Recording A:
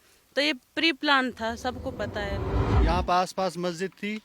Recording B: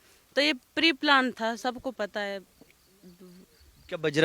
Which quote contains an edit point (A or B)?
A